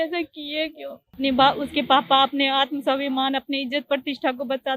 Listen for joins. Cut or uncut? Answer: cut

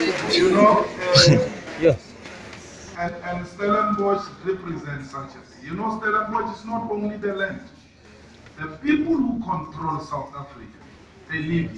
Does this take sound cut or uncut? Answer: uncut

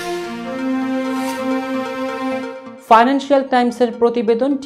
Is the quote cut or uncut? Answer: cut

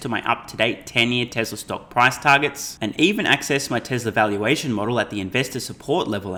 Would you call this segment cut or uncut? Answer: uncut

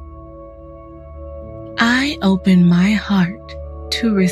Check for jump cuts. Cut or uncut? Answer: cut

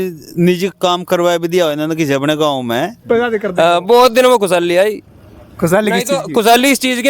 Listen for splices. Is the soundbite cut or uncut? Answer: cut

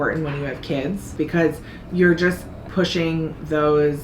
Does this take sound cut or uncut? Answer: cut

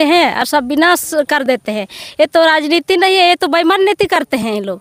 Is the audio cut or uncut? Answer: uncut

